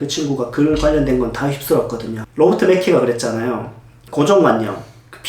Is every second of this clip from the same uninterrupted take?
no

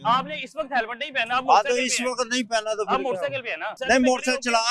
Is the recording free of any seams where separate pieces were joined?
no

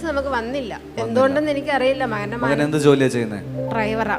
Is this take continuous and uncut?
yes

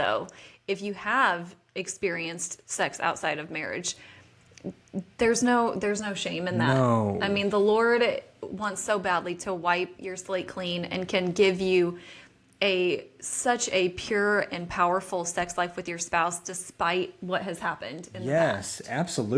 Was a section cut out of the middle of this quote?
no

